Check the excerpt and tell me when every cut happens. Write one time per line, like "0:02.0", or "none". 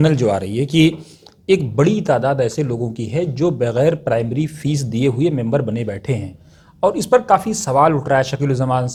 none